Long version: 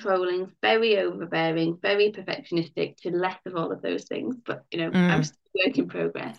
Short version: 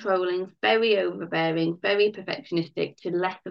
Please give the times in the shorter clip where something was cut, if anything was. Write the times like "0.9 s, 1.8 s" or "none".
none